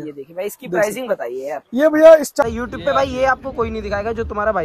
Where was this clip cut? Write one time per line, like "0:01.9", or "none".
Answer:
0:02.4